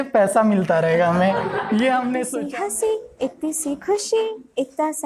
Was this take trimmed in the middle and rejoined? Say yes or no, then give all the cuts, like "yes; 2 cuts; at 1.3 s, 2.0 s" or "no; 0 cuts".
yes; 1 cut; at 2.3 s